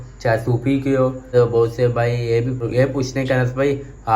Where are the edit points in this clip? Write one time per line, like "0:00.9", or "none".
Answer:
0:01.3
0:02.7